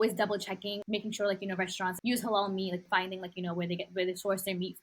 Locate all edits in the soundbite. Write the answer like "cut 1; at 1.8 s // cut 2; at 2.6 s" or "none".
cut 1; at 0.8 s // cut 2; at 2.0 s // cut 3; at 2.8 s